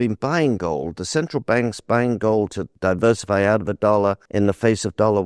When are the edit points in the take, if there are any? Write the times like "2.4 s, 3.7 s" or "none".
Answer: 2.6 s, 4.2 s